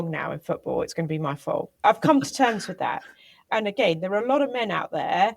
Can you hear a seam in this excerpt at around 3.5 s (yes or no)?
yes